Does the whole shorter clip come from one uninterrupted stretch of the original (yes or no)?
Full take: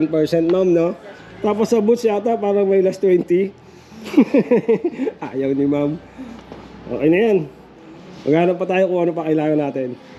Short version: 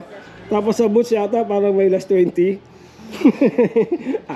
yes